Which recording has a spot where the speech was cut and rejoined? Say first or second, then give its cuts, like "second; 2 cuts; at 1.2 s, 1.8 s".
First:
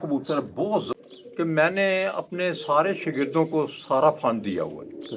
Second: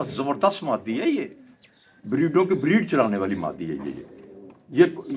first; 1 cut; at 1.0 s